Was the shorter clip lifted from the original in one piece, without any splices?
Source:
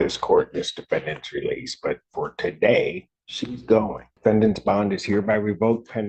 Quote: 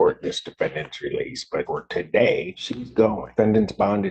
no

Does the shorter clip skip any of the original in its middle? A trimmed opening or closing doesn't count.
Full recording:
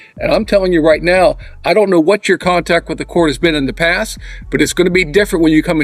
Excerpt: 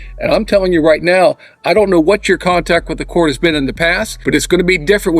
yes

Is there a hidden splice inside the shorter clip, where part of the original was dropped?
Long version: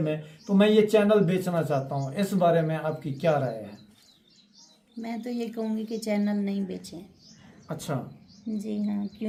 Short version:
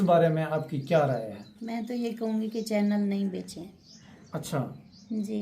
yes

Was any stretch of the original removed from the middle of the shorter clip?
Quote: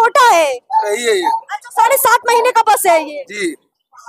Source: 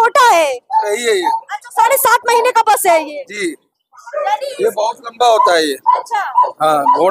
no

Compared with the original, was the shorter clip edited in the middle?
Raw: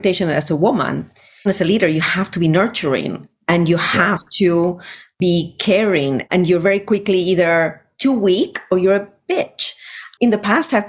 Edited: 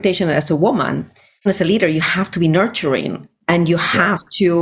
no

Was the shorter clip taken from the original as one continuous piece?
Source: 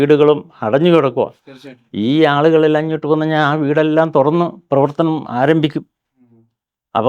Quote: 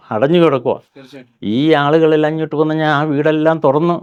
yes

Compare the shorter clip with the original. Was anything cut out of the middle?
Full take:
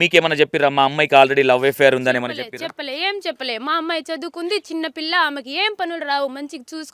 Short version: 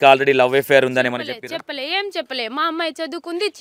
no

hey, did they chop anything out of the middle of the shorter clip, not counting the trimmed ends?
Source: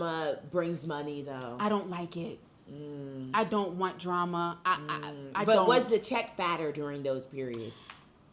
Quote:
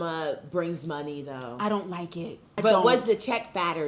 yes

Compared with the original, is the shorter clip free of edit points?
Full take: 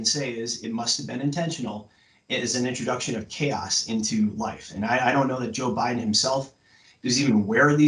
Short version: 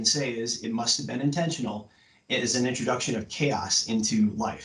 yes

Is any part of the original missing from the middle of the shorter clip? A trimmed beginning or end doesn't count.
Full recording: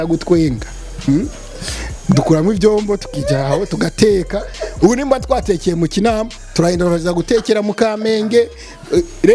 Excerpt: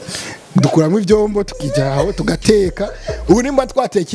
no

